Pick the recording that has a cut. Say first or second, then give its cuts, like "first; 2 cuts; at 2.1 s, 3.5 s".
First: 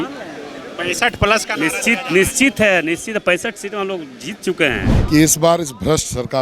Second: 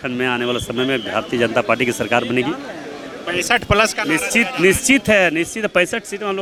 first; 1 cut; at 4.9 s